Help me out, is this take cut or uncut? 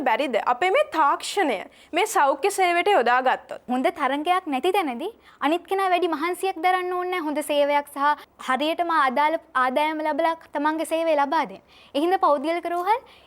cut